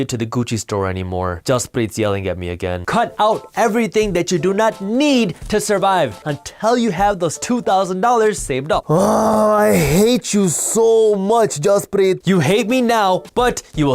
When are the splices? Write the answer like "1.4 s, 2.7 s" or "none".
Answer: 1.4 s, 6.2 s, 8.8 s

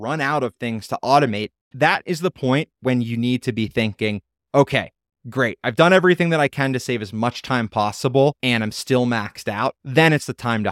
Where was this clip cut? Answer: 1.6 s, 8.4 s, 9.8 s

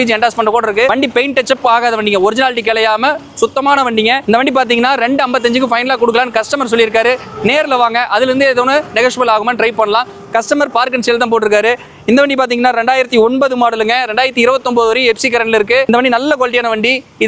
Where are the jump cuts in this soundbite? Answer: none

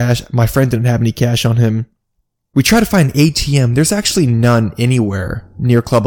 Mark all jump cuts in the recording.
2.3 s

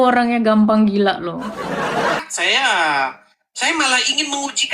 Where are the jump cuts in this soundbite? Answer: 2.2 s

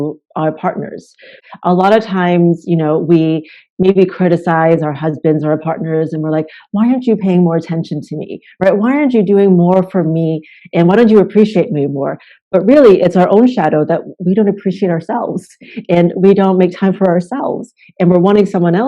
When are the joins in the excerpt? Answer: 1.4 s

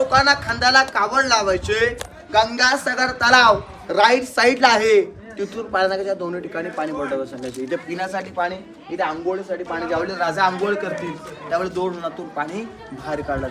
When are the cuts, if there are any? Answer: none

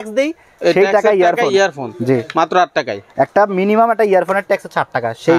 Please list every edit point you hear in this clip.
none

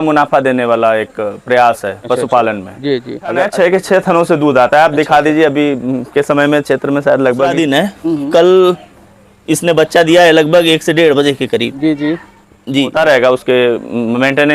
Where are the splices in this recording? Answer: 3.5 s, 7.5 s, 12.9 s

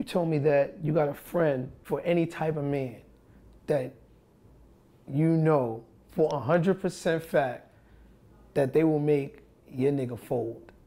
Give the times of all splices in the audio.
1.8 s

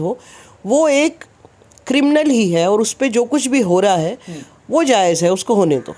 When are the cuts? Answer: none

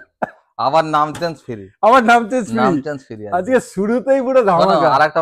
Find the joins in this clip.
none

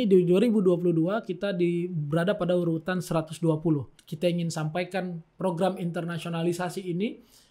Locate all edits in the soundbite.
4.0 s

